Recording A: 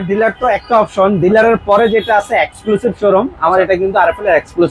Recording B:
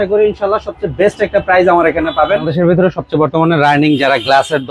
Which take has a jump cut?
B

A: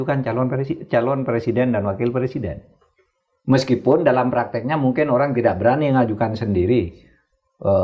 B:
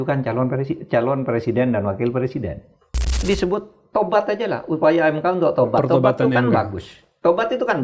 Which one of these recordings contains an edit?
B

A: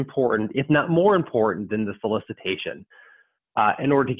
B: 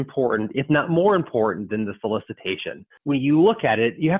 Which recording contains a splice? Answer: B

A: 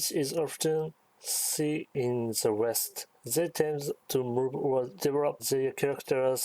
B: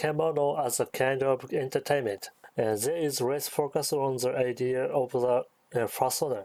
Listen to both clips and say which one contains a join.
A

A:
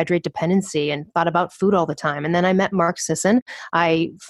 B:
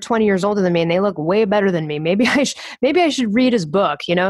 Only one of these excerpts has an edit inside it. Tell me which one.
A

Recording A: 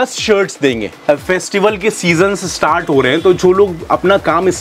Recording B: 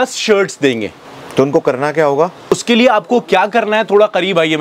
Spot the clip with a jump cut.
A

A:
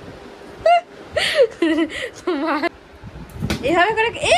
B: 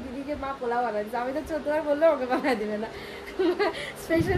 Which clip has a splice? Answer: A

